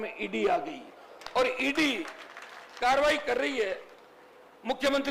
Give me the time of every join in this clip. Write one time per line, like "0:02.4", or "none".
none